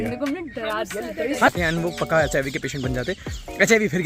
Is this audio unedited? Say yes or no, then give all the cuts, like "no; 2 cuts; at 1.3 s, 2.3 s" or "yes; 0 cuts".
no; 1 cut; at 1.5 s